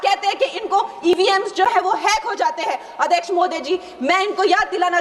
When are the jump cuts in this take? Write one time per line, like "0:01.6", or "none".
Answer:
none